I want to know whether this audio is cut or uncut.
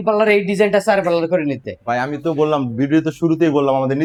uncut